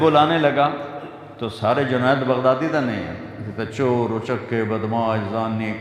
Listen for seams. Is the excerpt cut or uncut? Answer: uncut